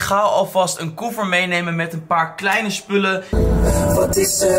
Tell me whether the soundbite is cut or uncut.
cut